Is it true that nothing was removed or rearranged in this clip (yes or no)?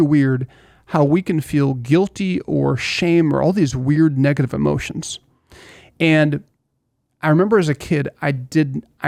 yes